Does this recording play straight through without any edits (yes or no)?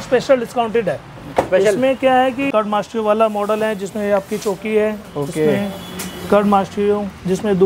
no